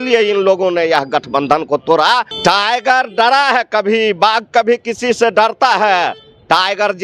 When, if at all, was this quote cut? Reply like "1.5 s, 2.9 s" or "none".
2.3 s